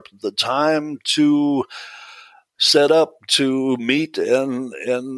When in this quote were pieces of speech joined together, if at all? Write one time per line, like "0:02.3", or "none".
none